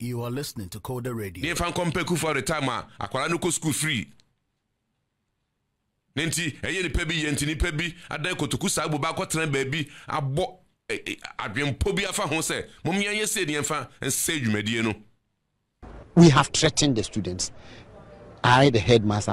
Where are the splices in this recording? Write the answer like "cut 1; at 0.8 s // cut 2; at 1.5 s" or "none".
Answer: cut 1; at 16.0 s